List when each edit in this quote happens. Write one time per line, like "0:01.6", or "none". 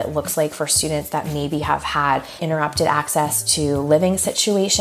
0:02.4